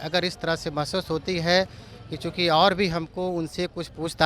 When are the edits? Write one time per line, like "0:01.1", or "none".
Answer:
none

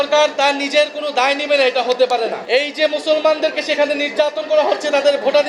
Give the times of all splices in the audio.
0:02.4

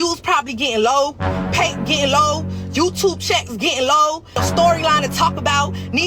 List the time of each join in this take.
0:04.4

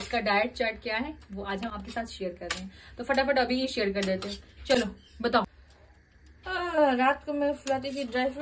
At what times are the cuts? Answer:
none

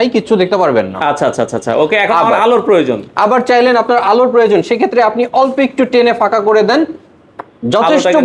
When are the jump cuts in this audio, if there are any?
none

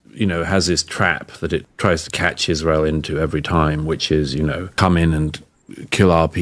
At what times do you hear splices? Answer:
0:01.7
0:04.7

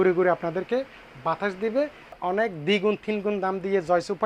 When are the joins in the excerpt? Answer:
0:02.1

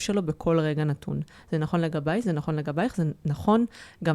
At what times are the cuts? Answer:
none

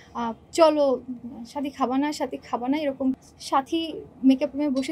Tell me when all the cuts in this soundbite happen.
0:03.2

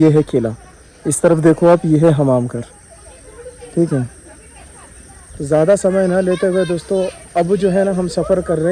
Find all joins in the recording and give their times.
none

